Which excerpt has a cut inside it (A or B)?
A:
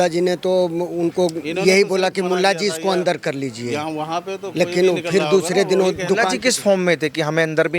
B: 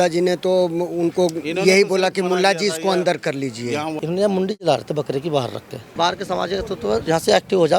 B